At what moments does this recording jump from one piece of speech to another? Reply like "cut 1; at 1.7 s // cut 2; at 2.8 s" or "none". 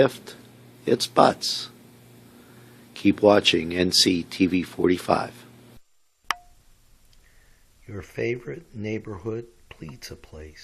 cut 1; at 5.7 s